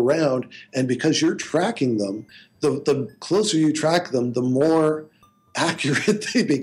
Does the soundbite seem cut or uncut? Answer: uncut